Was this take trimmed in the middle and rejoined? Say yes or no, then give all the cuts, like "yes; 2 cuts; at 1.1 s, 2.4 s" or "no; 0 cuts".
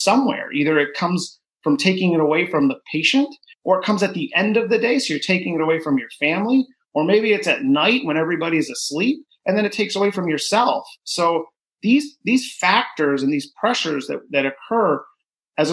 yes; 1 cut; at 3.5 s